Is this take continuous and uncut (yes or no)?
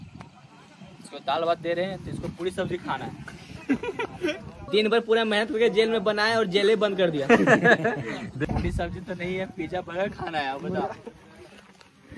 no